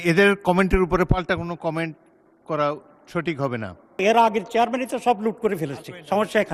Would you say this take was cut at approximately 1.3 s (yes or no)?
no